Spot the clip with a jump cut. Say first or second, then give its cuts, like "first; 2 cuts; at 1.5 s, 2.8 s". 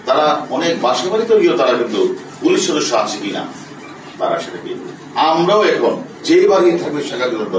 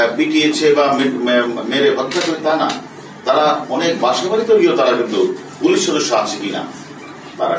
first; 1 cut; at 6.1 s